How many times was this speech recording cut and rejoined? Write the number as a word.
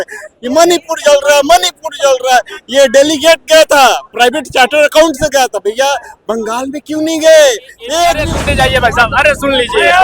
one